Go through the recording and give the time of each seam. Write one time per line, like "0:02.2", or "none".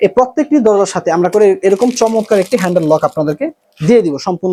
none